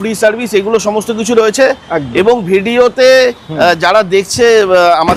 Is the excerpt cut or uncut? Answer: uncut